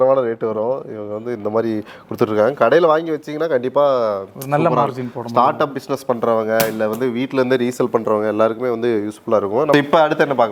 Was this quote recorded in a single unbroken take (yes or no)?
yes